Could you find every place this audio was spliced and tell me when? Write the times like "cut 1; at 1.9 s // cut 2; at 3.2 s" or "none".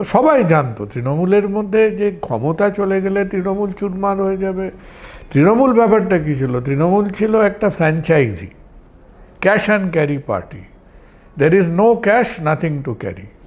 none